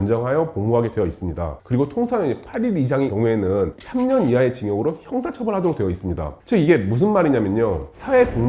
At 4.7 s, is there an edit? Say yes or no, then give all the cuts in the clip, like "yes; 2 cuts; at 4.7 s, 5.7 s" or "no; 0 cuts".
no; 3 cuts; at 1.5 s, 3.4 s, 6.3 s